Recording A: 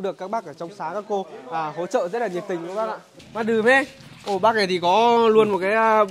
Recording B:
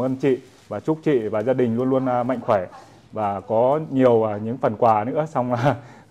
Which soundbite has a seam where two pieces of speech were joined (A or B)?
A